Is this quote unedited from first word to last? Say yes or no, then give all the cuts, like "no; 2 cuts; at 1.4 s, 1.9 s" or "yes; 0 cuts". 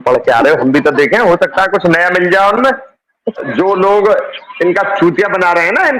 no; 1 cut; at 3.4 s